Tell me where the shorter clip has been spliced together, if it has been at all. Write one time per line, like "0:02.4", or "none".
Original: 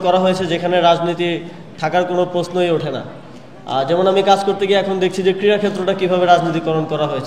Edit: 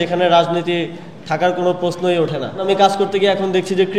0:02.6